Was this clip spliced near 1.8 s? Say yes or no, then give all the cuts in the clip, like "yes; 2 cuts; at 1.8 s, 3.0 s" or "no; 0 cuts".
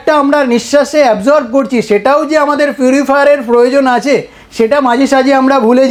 no; 0 cuts